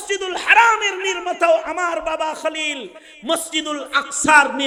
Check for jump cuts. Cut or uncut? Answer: uncut